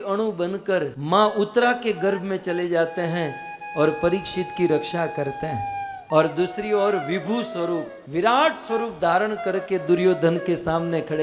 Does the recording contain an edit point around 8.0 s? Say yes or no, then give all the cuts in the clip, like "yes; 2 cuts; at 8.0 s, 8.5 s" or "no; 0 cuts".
yes; 3 cuts; at 1.0 s, 6.0 s, 8.0 s